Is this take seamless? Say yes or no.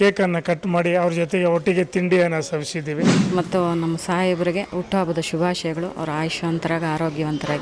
no